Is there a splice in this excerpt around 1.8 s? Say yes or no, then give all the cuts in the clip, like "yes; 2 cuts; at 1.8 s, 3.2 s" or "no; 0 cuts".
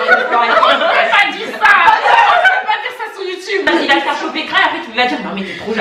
no; 1 cut; at 3.7 s